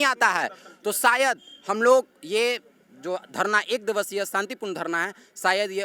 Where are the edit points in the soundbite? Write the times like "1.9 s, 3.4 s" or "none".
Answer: none